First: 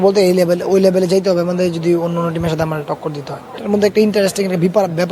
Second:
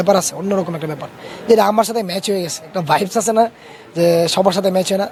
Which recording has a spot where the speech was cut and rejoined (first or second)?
first